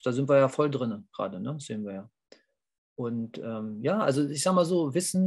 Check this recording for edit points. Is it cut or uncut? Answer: uncut